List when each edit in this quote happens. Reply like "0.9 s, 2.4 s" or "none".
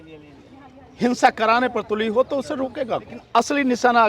3.2 s